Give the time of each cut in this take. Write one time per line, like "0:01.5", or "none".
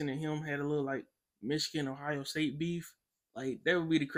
none